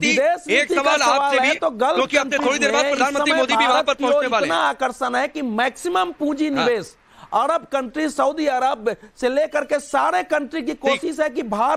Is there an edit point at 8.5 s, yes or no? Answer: yes